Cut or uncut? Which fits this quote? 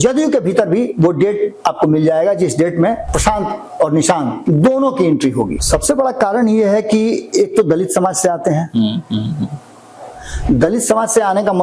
cut